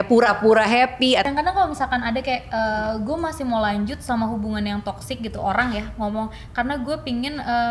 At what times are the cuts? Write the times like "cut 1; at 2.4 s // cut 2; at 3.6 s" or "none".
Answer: cut 1; at 1.3 s